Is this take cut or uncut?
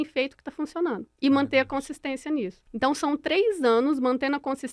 cut